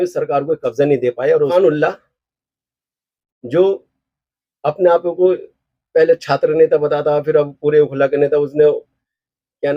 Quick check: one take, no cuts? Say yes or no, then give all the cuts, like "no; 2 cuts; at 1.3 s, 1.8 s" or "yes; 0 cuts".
no; 1 cut; at 1.5 s